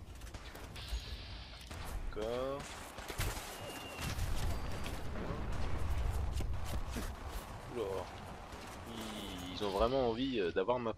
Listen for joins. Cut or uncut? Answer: cut